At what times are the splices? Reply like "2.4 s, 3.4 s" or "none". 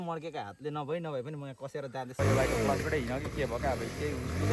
2.2 s